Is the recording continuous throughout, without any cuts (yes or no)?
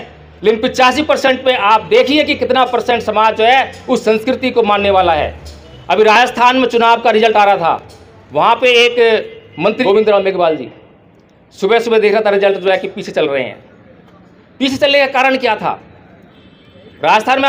no